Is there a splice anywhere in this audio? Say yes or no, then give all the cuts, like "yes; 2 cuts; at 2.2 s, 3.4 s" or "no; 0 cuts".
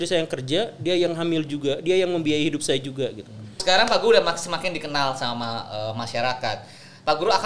yes; 1 cut; at 3.6 s